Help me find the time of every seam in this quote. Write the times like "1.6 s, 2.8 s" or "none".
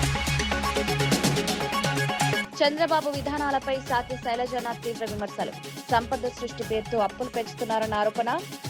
0.8 s, 2.5 s